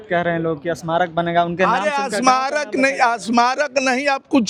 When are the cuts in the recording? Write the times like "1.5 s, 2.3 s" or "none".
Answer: none